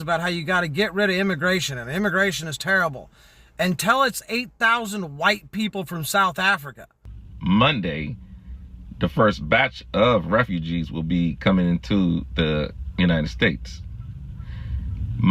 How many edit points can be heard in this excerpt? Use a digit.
1